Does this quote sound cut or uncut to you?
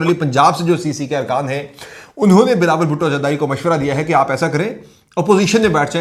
uncut